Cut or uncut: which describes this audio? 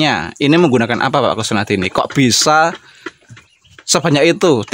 uncut